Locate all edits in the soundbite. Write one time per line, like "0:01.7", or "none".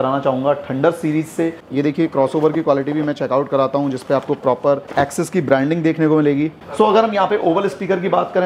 0:01.6
0:06.6